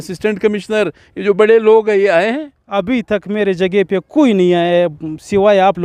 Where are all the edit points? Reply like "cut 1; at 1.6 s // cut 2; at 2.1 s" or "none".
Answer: none